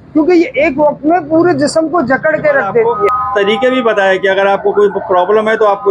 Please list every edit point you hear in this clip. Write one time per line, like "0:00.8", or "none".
0:03.0